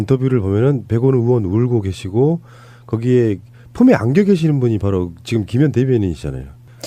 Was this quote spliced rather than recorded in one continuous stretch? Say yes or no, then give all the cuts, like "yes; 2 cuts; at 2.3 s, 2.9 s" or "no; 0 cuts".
yes; 1 cut; at 4.3 s